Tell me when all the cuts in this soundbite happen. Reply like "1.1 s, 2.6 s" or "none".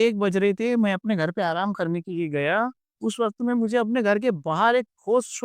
none